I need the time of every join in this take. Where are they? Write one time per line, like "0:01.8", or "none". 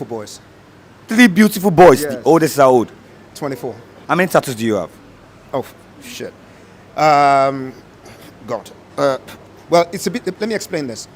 0:03.9